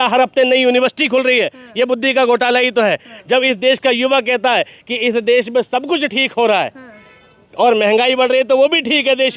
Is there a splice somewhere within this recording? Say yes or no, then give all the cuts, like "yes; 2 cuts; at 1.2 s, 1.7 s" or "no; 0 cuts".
no; 0 cuts